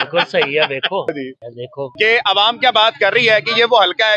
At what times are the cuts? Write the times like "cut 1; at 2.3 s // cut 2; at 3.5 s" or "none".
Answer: cut 1; at 1.4 s

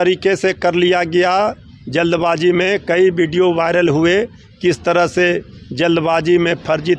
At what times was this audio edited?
none

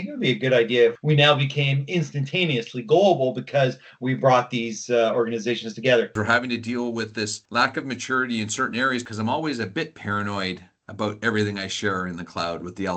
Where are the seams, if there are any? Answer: cut 1; at 1.0 s // cut 2; at 6.1 s // cut 3; at 9.0 s

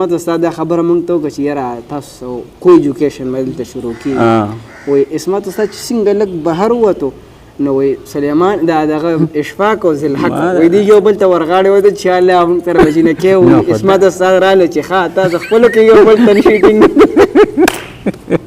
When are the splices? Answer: none

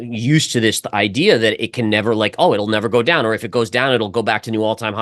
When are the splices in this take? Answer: none

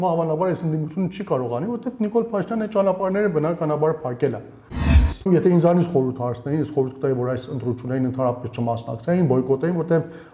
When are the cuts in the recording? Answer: cut 1; at 5.1 s

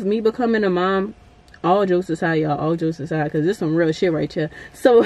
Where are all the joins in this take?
none

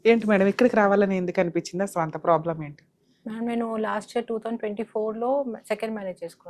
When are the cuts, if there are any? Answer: none

